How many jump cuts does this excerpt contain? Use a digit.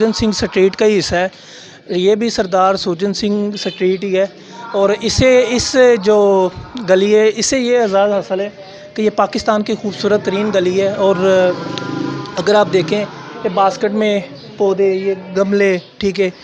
0